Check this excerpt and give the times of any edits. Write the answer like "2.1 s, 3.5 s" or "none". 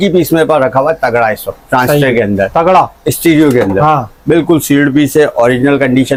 none